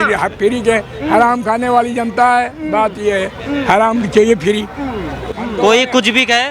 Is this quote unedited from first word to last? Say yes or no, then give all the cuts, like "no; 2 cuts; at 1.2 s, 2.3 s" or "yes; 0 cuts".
no; 1 cut; at 5.2 s